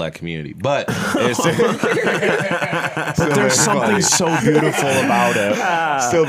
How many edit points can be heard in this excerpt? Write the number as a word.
zero